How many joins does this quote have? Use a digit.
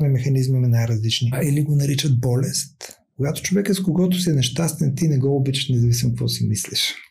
2